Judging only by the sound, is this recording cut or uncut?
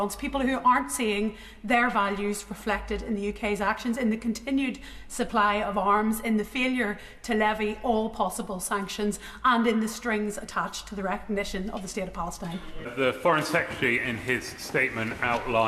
cut